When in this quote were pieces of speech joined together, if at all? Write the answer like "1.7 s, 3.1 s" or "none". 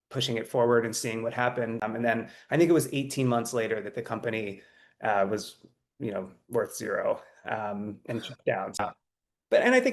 1.8 s, 8.8 s